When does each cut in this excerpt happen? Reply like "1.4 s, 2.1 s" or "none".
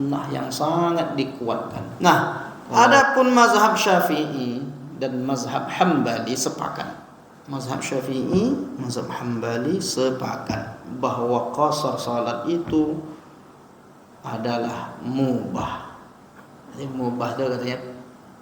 1.8 s